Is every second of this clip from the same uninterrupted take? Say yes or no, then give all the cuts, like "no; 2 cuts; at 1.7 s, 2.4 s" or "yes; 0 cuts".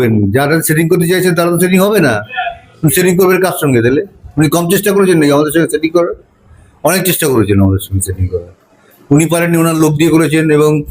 yes; 0 cuts